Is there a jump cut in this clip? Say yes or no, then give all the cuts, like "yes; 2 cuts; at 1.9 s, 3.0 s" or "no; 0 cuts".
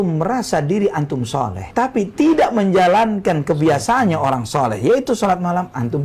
no; 0 cuts